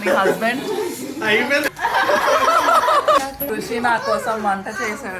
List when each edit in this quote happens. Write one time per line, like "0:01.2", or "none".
0:01.7
0:03.2